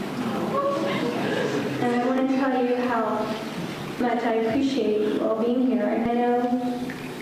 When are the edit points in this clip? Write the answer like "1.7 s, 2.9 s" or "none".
none